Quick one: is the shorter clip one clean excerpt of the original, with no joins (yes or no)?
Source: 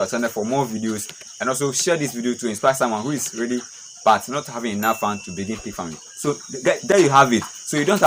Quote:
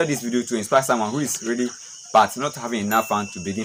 yes